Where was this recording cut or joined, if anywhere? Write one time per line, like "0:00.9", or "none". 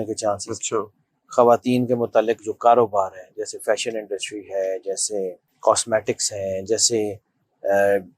0:05.5